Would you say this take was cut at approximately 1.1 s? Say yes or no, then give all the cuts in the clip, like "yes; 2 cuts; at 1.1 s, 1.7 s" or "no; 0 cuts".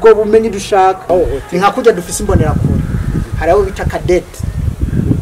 yes; 1 cut; at 1.1 s